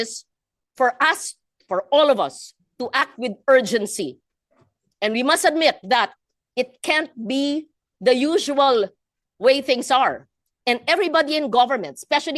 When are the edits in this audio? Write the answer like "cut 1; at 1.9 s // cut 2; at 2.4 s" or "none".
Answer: none